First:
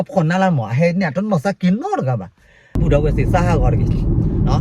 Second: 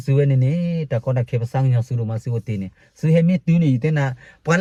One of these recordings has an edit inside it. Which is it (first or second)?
first